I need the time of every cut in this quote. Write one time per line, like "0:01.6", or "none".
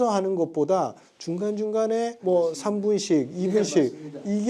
none

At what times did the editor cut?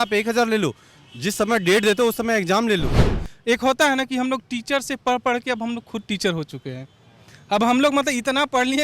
0:03.1

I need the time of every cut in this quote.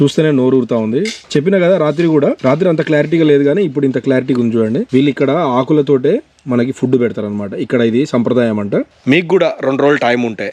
0:01.2
0:02.4
0:04.8
0:08.9

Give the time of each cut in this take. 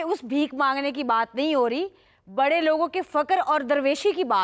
none

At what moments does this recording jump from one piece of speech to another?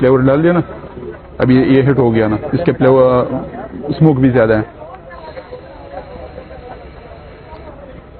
none

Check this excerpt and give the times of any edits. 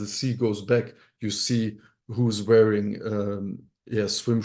none

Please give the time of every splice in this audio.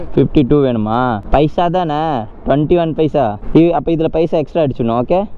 0:01.2
0:03.4

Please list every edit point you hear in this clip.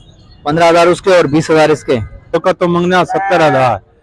0:02.3

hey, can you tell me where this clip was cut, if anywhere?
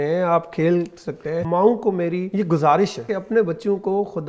0:01.3
0:02.3
0:03.1

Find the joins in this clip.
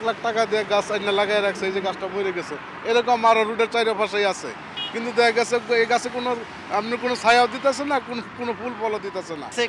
none

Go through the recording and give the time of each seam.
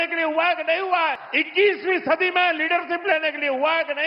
0:01.3

